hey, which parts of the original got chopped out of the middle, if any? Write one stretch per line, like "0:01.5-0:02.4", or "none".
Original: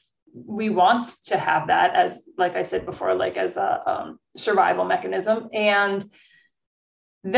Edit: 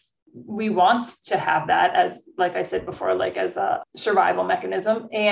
0:03.8-0:04.2